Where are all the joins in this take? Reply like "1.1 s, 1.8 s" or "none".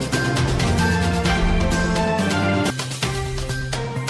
1.4 s